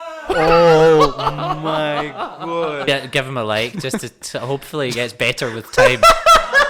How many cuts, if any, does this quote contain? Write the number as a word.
one